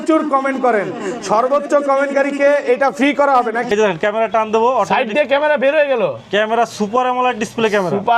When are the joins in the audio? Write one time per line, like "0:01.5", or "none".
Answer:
0:03.7